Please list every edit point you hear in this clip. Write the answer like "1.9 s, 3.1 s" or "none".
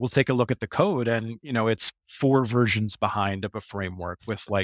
none